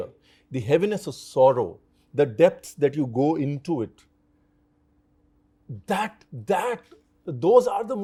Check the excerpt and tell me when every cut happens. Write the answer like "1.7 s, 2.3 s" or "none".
none